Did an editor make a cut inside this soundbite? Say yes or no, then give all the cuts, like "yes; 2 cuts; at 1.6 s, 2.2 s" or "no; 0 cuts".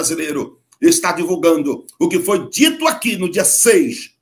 no; 0 cuts